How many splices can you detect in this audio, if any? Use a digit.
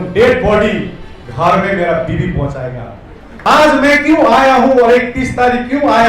1